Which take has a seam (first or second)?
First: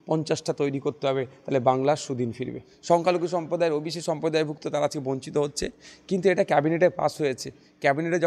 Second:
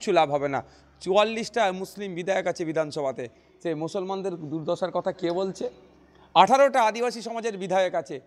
first